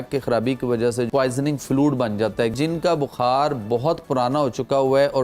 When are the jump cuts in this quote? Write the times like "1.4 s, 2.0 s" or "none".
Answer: 1.1 s, 2.5 s